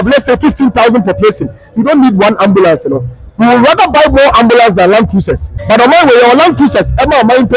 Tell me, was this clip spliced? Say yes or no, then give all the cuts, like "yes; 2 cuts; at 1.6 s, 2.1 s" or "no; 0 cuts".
yes; 1 cut; at 5.6 s